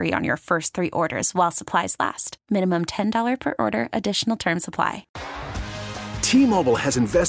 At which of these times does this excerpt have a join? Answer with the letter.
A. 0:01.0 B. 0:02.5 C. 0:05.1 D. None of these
C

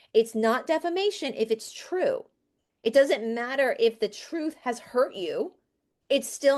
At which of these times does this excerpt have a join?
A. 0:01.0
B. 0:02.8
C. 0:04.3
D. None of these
D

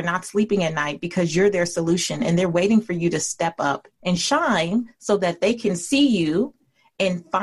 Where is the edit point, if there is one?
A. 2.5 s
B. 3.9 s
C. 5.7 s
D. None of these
B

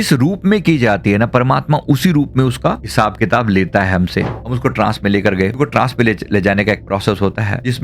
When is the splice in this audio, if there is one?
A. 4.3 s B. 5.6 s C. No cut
A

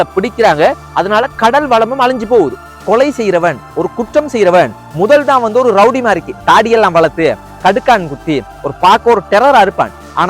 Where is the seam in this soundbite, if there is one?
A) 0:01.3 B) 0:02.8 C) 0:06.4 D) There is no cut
B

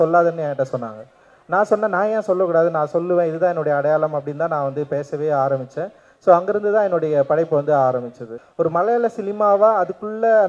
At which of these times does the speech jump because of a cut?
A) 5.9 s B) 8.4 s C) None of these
B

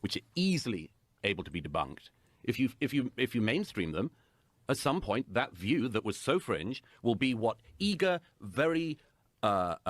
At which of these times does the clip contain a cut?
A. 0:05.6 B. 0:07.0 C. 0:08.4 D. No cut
C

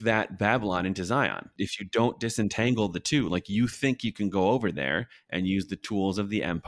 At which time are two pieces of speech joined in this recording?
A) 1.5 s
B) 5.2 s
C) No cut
A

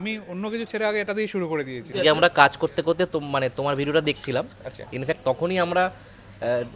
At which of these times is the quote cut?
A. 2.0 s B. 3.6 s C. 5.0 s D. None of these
A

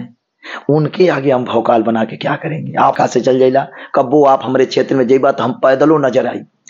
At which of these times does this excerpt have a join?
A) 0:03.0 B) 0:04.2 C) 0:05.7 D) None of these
A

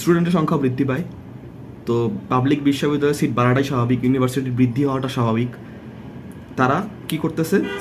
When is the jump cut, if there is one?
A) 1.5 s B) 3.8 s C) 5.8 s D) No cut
D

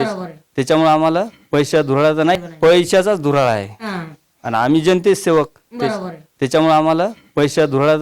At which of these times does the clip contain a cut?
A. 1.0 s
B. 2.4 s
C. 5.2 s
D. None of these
B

